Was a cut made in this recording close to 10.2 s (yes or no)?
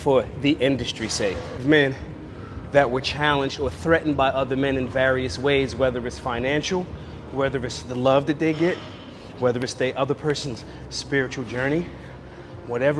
yes